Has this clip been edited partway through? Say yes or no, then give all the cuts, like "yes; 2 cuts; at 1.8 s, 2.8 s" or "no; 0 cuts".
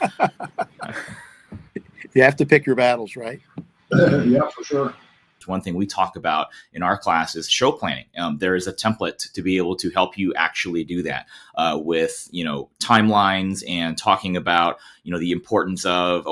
yes; 1 cut; at 5.3 s